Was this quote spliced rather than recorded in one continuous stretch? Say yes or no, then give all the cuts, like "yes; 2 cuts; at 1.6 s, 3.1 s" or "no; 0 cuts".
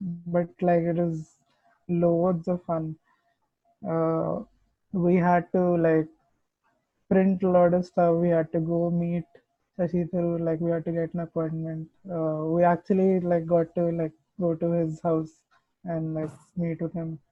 no; 0 cuts